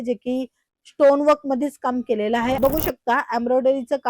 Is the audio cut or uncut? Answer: cut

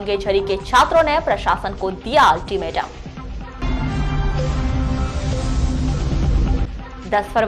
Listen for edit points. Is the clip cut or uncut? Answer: uncut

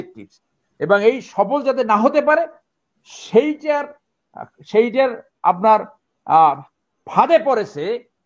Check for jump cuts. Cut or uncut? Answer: uncut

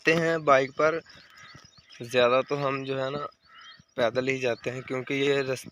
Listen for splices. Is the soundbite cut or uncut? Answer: uncut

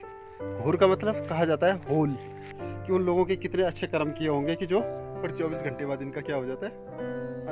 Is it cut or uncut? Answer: cut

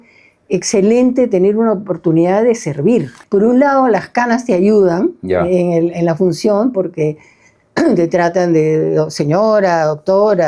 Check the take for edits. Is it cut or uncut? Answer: cut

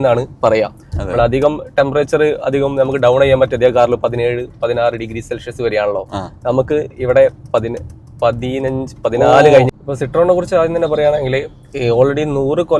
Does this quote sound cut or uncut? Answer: cut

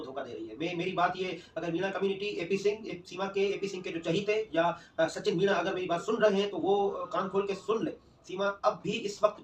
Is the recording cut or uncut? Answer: uncut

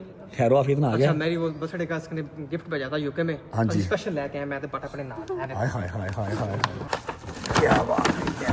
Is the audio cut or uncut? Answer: uncut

